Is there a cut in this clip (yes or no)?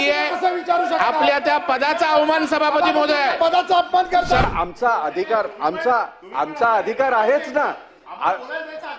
yes